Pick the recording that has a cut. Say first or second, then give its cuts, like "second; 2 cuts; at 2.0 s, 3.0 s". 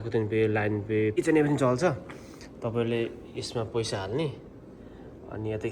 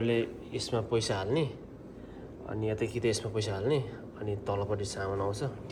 first; 1 cut; at 1.1 s